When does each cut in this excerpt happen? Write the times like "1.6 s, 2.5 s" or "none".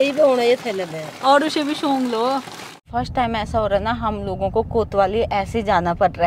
3.0 s